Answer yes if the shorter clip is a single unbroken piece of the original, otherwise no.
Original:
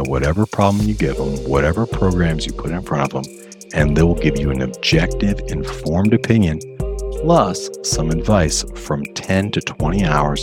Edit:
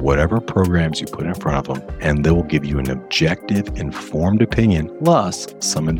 no